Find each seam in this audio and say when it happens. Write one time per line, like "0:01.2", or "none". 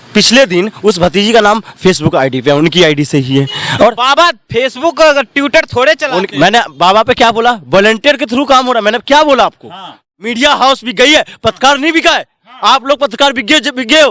0:10.1